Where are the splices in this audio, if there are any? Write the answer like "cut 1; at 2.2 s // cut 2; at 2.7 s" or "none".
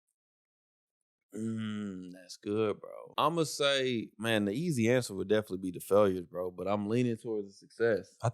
cut 1; at 3.0 s

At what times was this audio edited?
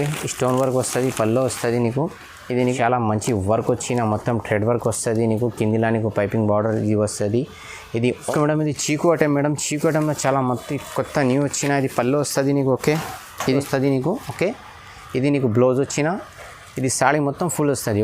cut 1; at 2.6 s // cut 2; at 8.2 s // cut 3; at 13.6 s

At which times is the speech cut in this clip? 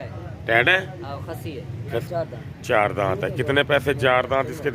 cut 1; at 2.0 s

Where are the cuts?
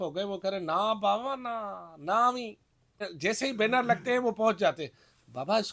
cut 1; at 3.1 s

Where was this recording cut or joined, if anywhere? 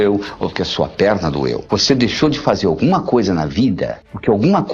cut 1; at 1.6 s

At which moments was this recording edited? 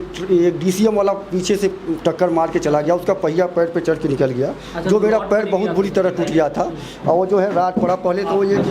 none

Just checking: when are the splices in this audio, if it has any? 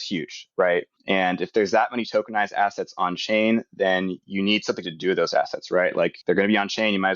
cut 1; at 0.9 s // cut 2; at 6.2 s

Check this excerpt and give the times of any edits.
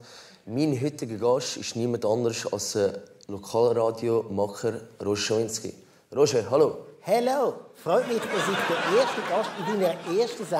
none

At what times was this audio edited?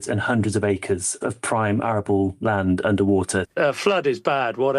cut 1; at 1.2 s // cut 2; at 3.5 s

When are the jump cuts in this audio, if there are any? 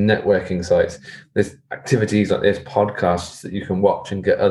none

